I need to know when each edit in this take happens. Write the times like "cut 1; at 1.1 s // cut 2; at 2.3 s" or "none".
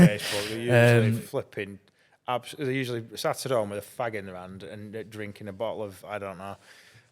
none